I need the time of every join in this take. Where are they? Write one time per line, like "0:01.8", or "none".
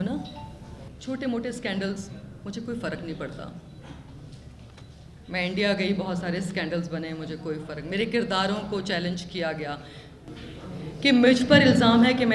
none